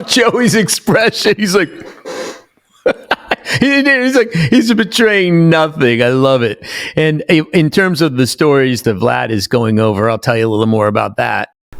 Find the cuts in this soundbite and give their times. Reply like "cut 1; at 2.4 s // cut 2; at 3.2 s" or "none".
cut 1; at 8.8 s